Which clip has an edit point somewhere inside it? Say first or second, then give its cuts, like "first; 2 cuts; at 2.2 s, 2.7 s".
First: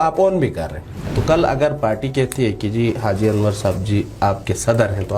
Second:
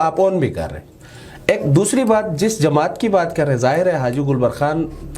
first; 1 cut; at 1.1 s